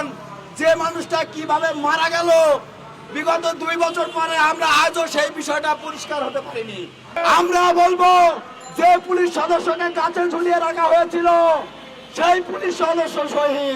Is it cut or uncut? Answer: cut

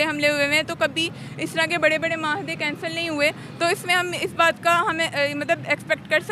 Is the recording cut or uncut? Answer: uncut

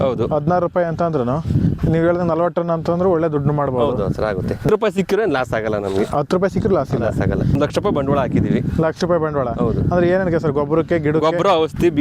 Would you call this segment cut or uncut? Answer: cut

